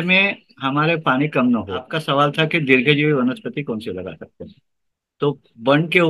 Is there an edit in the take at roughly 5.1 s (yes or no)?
no